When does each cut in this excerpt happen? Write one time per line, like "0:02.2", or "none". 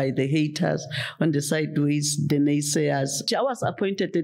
0:03.2